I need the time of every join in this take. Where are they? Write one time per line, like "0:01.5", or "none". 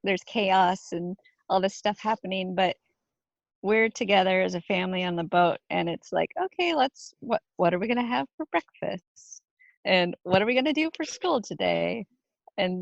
none